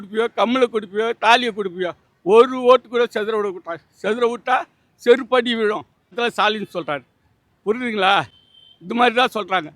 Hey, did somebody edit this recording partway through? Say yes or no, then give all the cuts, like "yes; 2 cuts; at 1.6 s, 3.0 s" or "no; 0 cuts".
yes; 1 cut; at 6.2 s